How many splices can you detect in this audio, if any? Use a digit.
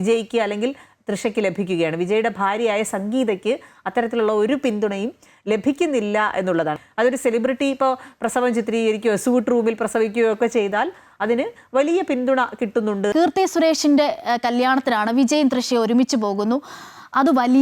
2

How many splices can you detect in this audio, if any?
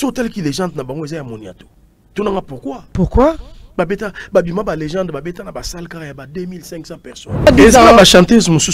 1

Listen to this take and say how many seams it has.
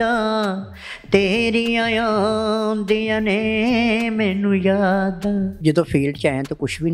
1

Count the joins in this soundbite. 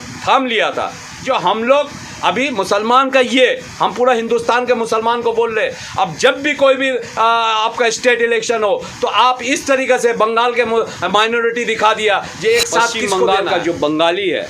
1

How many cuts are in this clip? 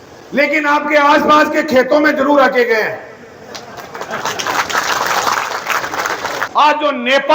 1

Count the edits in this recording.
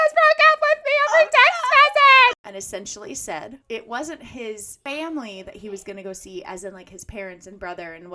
3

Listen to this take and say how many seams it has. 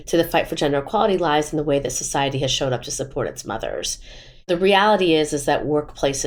0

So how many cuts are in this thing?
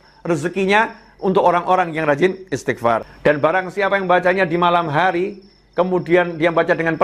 1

